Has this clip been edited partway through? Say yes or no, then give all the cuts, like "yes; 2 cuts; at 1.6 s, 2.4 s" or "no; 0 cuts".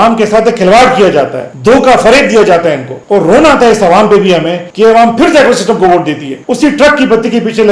yes; 2 cuts; at 2.9 s, 6.3 s